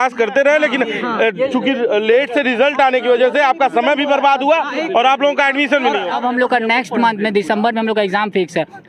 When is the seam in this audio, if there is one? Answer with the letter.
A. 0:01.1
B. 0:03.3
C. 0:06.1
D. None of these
C